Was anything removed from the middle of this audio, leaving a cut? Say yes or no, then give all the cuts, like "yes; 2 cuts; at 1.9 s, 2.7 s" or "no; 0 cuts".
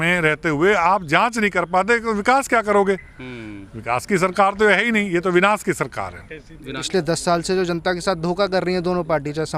yes; 1 cut; at 6.7 s